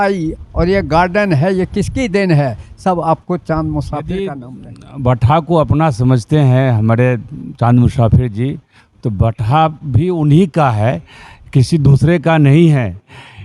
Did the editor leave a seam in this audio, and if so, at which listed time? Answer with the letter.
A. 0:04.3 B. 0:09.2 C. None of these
A